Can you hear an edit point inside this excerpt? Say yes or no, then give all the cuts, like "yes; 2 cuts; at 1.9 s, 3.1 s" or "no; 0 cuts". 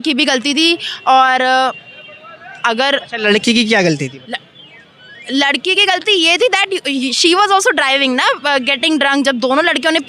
no; 0 cuts